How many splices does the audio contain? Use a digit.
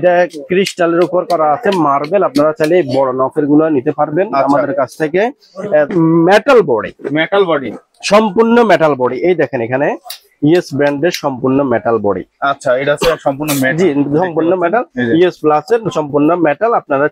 1